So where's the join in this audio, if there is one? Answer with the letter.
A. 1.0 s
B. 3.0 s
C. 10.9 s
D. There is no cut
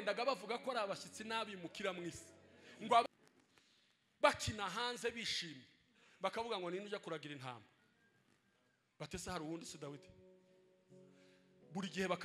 B